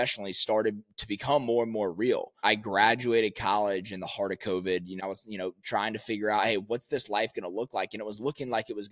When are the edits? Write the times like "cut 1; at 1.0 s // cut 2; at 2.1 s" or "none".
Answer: cut 1; at 2.4 s // cut 2; at 4.9 s